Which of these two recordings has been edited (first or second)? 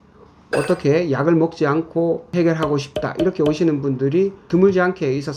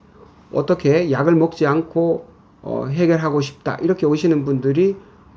first